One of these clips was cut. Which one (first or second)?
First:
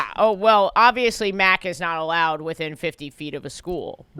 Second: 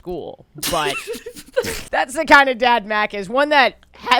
second